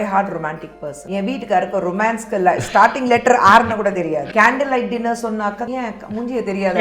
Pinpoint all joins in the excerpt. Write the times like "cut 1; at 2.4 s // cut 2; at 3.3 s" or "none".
cut 1; at 1.0 s // cut 2; at 4.3 s // cut 3; at 5.6 s